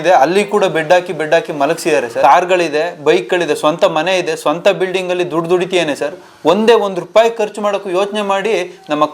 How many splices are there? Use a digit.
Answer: 1